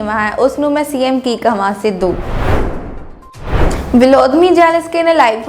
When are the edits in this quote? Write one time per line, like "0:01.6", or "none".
0:02.2
0:03.9